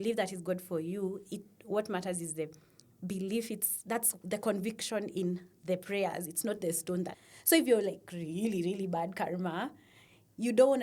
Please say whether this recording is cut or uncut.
cut